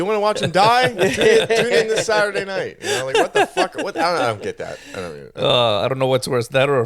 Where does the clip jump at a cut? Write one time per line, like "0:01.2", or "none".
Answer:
none